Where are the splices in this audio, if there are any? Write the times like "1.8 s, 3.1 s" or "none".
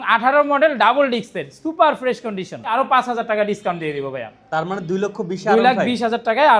2.7 s